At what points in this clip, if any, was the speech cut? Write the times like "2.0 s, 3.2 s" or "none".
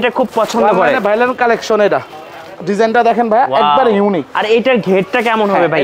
none